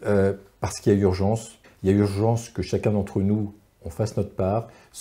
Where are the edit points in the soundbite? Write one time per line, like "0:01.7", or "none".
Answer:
0:01.6